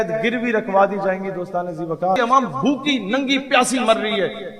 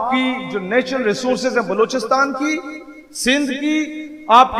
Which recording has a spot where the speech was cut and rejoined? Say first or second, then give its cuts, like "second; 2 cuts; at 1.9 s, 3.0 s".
first; 1 cut; at 2.2 s